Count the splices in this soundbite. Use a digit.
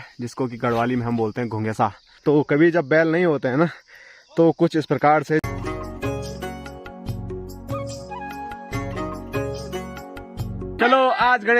3